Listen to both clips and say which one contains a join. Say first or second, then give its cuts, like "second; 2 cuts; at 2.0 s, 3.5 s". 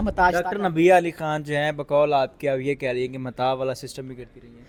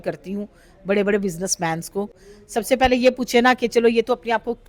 second; 1 cut; at 2.3 s